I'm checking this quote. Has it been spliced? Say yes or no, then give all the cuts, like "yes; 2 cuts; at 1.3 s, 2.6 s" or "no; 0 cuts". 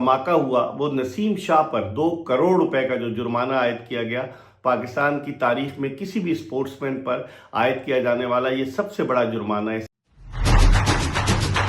yes; 1 cut; at 9.9 s